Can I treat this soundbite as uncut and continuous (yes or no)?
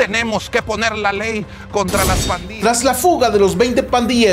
no